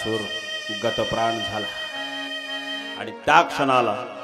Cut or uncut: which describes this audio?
cut